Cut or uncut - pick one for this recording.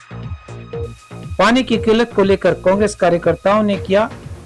cut